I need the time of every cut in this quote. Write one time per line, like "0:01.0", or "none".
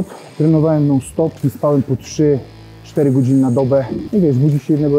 0:01.4
0:04.0